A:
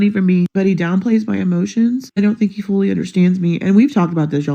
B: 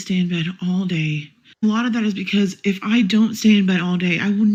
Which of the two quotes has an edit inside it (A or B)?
A